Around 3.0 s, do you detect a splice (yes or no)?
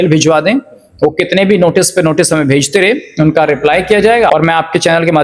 no